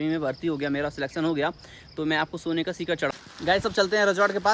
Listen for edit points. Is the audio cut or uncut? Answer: cut